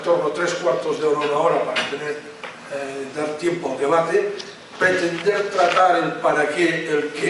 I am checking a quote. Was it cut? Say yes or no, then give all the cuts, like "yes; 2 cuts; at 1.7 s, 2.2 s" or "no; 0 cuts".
yes; 1 cut; at 3.6 s